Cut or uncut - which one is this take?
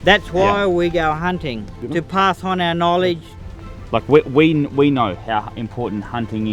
cut